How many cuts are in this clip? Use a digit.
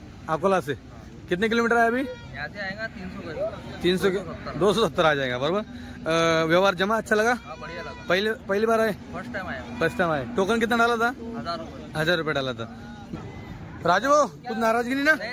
1